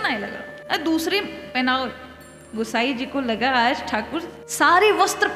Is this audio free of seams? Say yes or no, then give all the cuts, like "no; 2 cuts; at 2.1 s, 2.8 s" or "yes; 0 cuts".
yes; 0 cuts